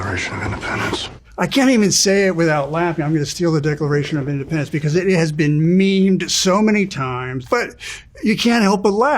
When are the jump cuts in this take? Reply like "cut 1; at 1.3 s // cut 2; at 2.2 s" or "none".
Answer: cut 1; at 1.2 s // cut 2; at 7.3 s

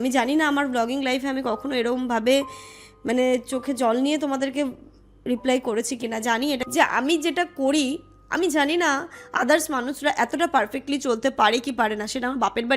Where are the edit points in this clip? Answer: cut 1; at 6.6 s

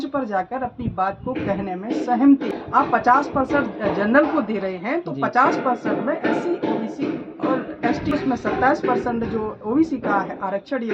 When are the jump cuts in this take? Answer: cut 1; at 2.6 s // cut 2; at 8.1 s

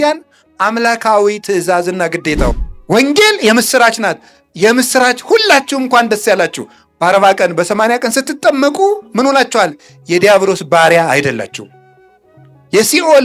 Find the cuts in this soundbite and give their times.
cut 1; at 2.7 s

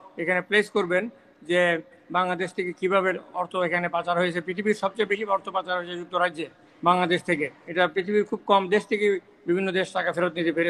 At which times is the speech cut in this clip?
cut 1; at 7.6 s

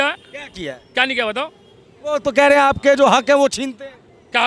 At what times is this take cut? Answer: none

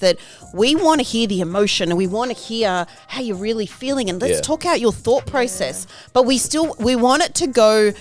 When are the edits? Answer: none

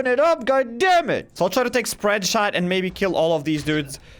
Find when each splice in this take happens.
cut 1; at 1.3 s

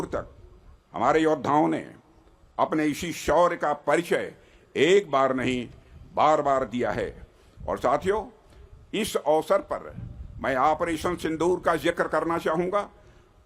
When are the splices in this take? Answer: none

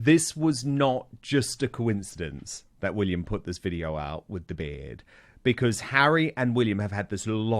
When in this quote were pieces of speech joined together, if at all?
cut 1; at 2.7 s

